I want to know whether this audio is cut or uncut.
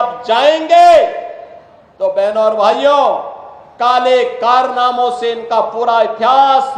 uncut